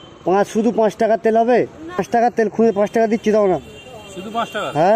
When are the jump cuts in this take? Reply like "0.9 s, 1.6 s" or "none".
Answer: 2.0 s

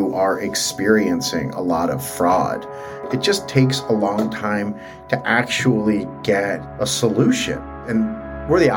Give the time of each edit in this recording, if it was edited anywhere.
3.1 s, 6.7 s, 7.7 s

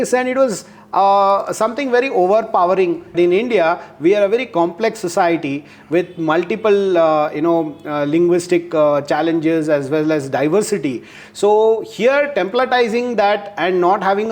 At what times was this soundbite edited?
3.1 s

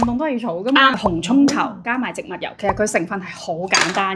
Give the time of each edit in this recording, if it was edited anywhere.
0.9 s

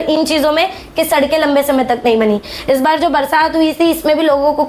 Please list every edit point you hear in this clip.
none

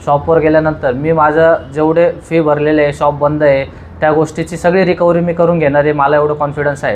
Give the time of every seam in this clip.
none

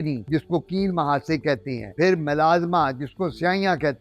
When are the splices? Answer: none

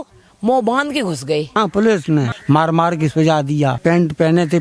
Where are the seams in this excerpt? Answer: 1.6 s, 2.3 s, 3.8 s

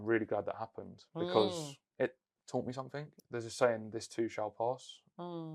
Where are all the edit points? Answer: 3.2 s

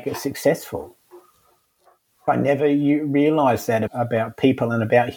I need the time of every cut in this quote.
2.2 s, 3.9 s

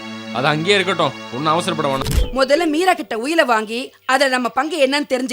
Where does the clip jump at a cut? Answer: 2.2 s

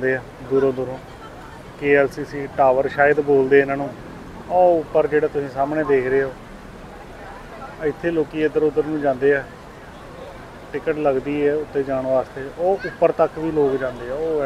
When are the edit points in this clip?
none

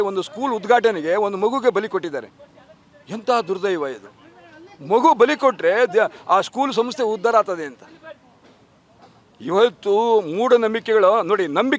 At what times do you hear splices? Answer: none

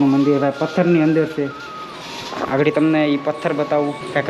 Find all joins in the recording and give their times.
none

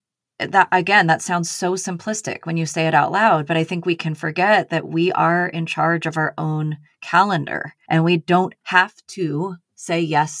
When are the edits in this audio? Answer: 7.7 s

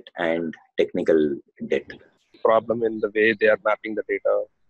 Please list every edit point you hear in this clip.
2.4 s

